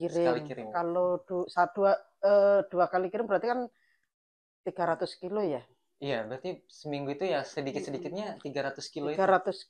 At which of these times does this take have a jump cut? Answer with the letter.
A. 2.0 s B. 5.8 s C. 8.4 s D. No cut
D